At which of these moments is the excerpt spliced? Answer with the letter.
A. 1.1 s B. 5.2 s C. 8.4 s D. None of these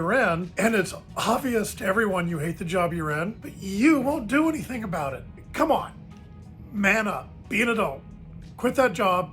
B